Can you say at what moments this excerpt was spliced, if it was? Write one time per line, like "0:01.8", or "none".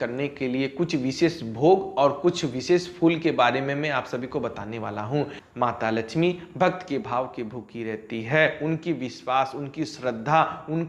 0:05.4

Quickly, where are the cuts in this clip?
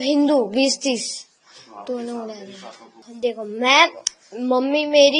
0:03.1

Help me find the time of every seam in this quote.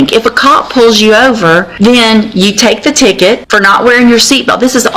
0:01.7
0:03.4

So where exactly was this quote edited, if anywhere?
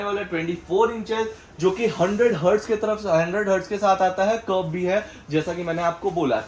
none

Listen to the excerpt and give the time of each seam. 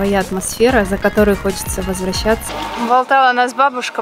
0:02.5

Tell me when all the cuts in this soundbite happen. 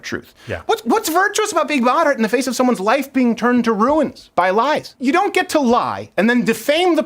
0:04.9

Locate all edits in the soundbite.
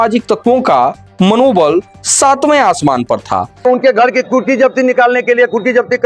0:03.7

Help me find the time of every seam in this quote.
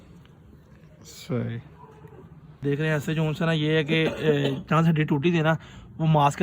0:02.6

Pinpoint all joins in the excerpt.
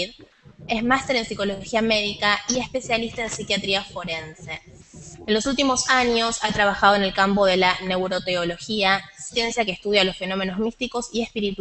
none

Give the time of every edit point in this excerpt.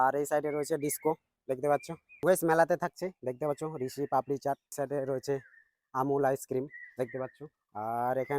0:02.1
0:04.7

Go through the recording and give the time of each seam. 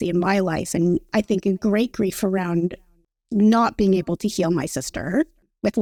none

